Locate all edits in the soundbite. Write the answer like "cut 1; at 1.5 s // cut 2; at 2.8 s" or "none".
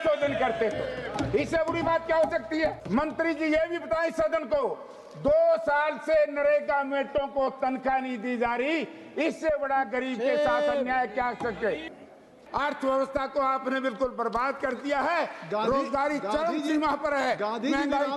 cut 1; at 2.5 s // cut 2; at 12.2 s